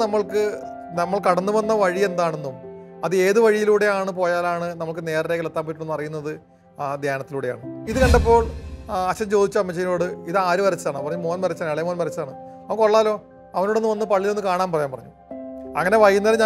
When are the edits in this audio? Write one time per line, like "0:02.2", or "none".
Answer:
0:07.7